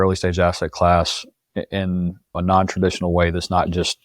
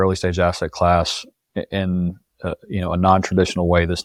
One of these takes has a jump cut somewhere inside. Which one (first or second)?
first